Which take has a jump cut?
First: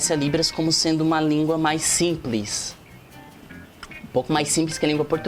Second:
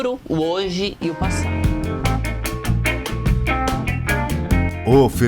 second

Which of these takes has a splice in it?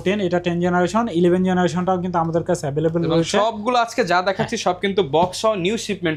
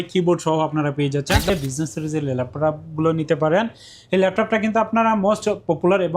second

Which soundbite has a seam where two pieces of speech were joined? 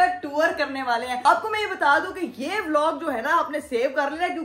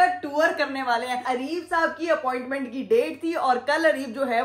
second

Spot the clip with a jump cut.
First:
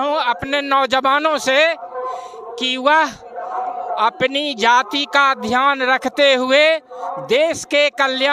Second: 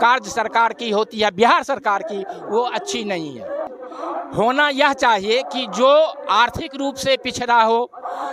second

